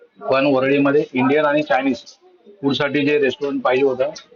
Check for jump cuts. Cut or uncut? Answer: uncut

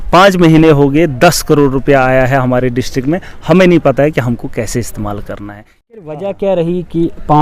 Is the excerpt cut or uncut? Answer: cut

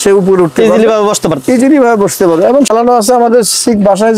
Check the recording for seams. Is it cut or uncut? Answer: cut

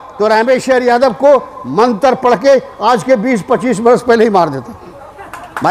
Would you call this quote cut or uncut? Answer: uncut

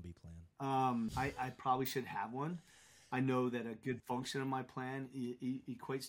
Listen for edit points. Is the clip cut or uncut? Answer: cut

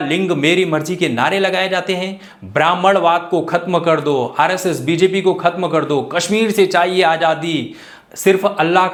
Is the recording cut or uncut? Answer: uncut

